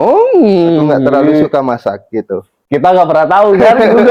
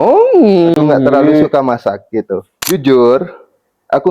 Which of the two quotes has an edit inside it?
second; 1 cut; at 2.5 s

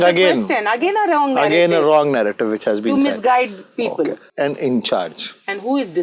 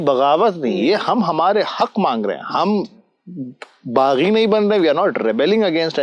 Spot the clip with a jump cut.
first; 1 cut; at 4.2 s

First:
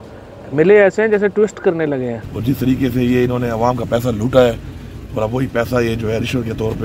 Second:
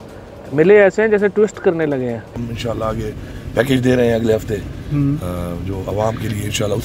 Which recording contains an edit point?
first; 1 cut; at 2.3 s

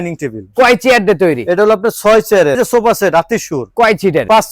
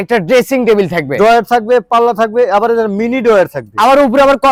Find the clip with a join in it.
first; 1 cut; at 2.6 s

